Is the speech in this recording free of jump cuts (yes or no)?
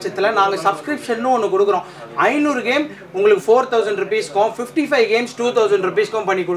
yes